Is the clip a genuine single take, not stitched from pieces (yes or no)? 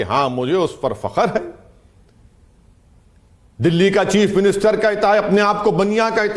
yes